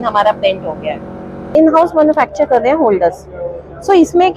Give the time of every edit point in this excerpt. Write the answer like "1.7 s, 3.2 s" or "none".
1.5 s

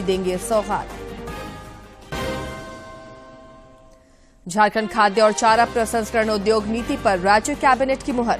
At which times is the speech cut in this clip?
none

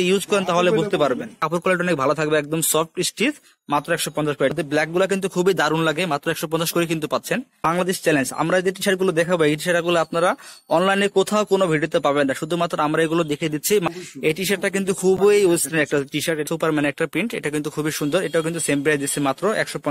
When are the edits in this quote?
1.4 s, 4.5 s, 7.7 s, 13.8 s, 16.5 s

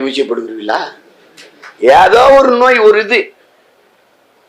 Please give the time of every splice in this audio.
none

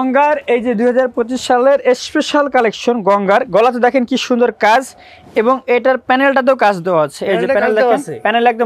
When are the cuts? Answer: none

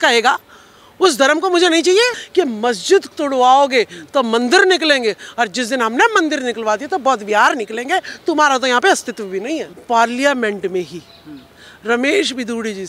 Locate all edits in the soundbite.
2.2 s, 9.7 s

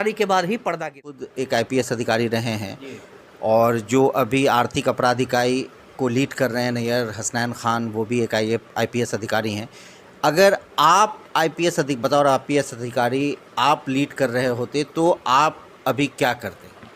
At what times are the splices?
1.2 s

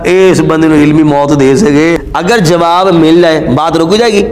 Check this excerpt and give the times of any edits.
2.1 s

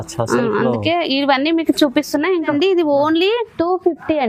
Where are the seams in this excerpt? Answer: 2.5 s

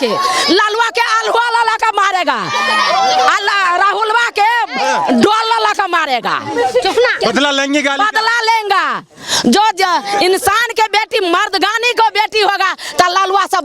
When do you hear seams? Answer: none

